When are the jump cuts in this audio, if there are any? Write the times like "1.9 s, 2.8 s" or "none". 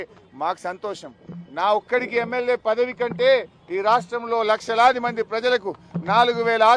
1.1 s